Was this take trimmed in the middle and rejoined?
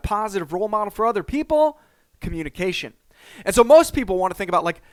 no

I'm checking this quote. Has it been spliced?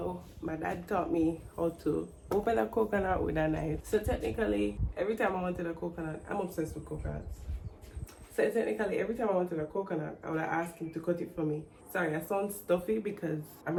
no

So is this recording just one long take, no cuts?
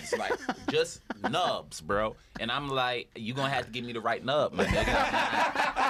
yes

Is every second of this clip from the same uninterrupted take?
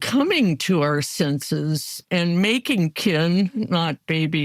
yes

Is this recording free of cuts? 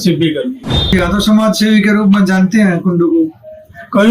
no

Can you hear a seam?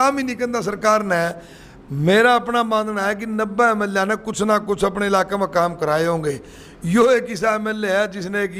no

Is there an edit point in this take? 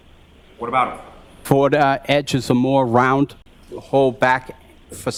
no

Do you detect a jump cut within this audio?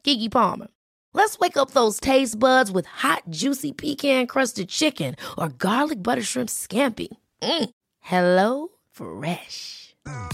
no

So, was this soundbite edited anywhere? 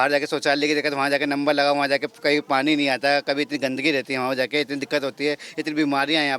no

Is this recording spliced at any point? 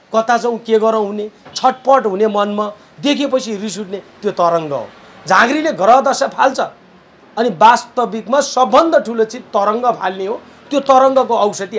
no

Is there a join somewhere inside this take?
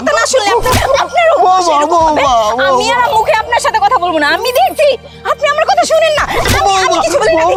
no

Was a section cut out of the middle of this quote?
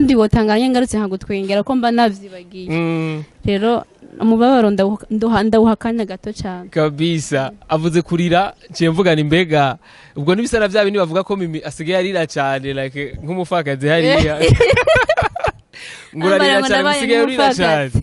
no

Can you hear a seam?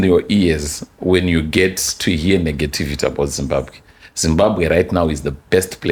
no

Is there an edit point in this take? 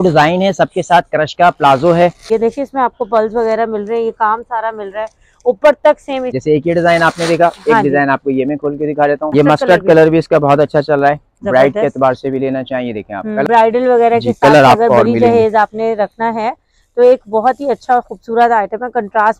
yes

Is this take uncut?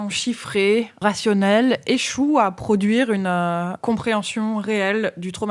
no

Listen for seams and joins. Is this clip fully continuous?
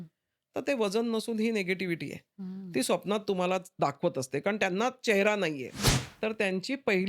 no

